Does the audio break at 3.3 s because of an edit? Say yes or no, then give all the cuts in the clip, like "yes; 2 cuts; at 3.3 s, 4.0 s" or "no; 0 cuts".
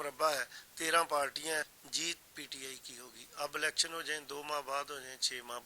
no; 1 cut; at 1.8 s